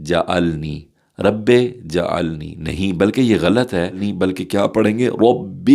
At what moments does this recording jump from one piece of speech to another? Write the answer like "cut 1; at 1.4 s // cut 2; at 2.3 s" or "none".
cut 1; at 4.1 s